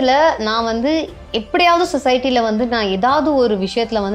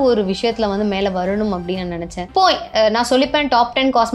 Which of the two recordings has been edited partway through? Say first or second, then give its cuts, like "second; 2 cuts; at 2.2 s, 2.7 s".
second; 1 cut; at 2.3 s